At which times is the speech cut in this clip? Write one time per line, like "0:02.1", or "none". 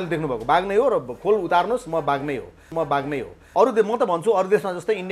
0:03.0